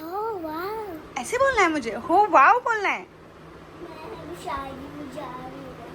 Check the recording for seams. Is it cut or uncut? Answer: cut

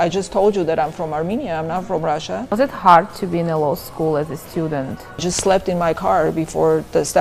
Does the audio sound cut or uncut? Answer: cut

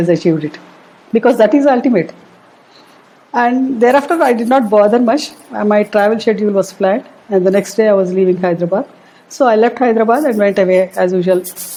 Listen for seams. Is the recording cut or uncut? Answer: uncut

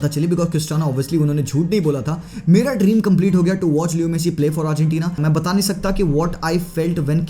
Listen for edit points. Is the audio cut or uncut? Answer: cut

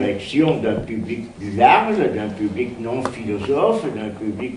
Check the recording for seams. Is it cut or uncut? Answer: cut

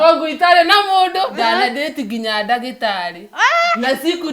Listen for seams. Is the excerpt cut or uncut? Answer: cut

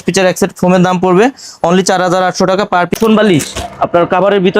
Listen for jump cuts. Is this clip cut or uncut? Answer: cut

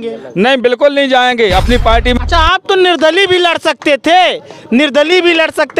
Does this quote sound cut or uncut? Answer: cut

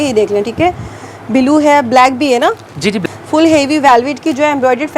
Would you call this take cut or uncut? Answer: cut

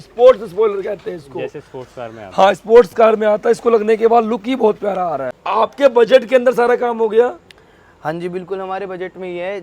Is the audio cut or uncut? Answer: cut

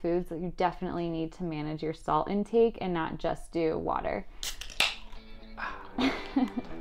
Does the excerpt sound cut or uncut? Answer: uncut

